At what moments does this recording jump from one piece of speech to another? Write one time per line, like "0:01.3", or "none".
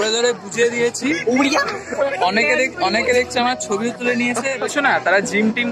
0:02.1
0:04.7